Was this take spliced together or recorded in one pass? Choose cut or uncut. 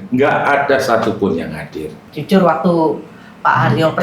cut